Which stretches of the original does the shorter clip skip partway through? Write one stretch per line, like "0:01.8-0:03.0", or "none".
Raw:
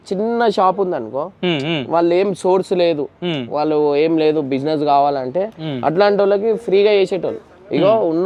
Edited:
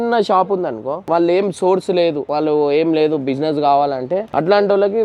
0:01.3-0:01.8
0:03.1-0:03.5
0:05.5-0:05.8